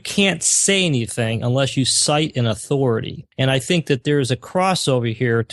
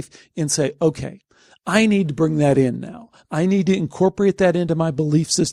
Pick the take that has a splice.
first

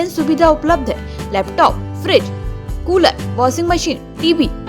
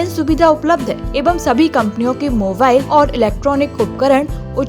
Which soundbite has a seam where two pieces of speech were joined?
second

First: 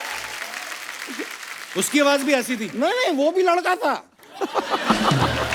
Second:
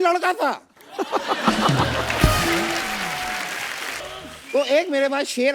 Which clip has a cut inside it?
second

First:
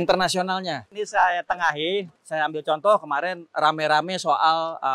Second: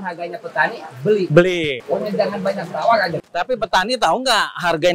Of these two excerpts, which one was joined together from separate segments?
first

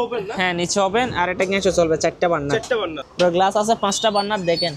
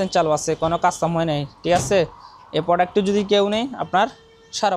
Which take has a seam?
first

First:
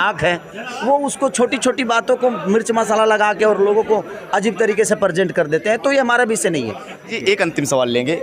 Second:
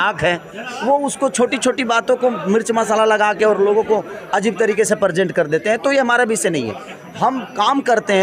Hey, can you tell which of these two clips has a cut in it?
first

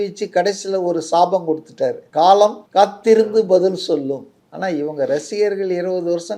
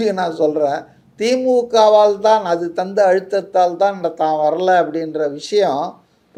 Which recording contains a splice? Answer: first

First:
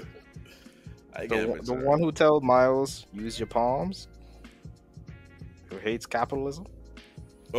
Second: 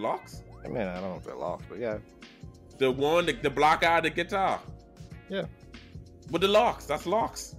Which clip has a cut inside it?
second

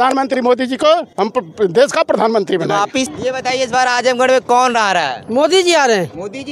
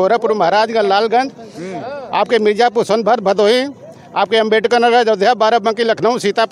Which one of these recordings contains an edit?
first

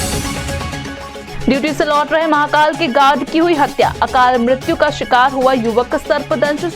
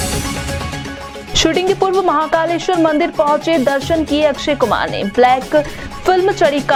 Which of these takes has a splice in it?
first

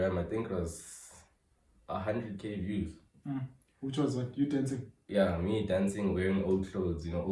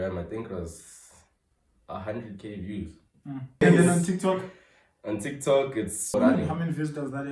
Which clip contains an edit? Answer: second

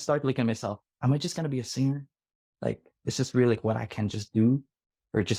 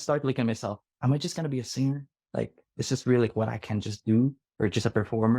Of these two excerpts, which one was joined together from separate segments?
second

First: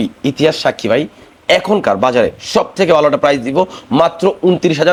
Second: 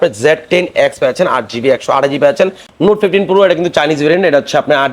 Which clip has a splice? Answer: second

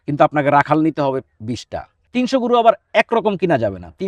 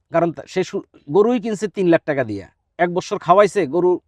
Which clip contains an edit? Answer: first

